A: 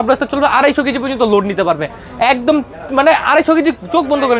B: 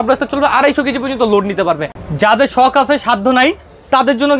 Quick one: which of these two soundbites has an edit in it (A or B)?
B